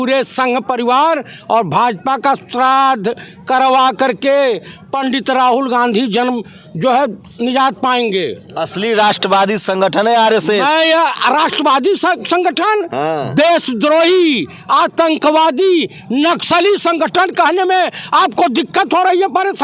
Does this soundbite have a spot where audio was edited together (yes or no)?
no